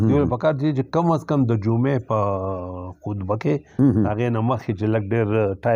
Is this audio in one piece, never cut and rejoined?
yes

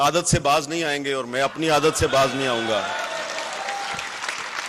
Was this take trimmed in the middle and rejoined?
no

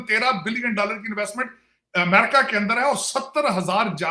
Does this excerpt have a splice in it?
no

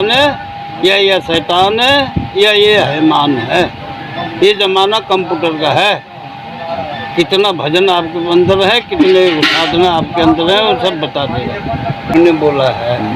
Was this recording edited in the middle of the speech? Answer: yes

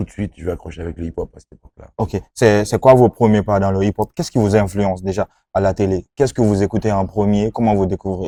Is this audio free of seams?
yes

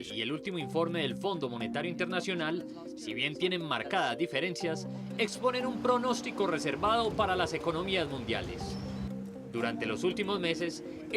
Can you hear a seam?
no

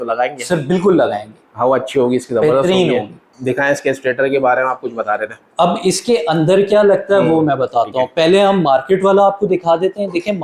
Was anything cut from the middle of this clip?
no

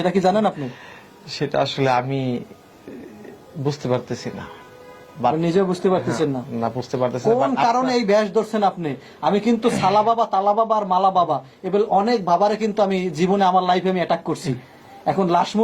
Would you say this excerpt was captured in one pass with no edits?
yes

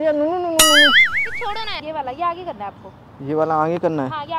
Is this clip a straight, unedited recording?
no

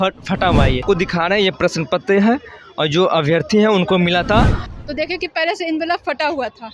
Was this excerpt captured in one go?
no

